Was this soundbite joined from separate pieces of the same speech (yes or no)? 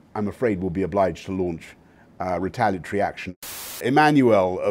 yes